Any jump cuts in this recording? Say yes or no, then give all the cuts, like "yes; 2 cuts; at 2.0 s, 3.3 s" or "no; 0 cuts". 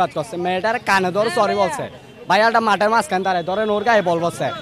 no; 0 cuts